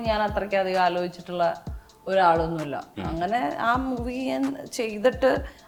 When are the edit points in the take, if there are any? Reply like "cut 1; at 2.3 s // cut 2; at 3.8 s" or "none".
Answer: none